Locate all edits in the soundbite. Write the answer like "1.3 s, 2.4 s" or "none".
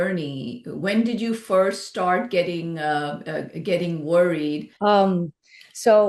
4.7 s